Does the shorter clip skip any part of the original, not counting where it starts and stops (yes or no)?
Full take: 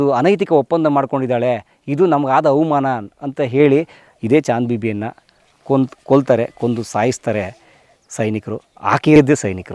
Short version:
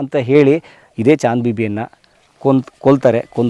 no